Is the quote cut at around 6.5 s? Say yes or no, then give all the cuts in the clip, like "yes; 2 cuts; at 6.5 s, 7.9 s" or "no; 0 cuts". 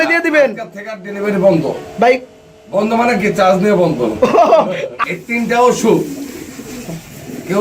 no; 1 cut; at 4.9 s